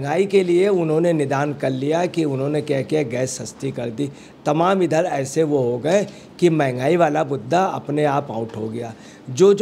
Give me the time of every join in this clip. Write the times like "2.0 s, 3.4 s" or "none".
none